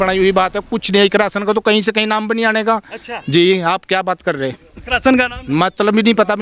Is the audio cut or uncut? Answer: uncut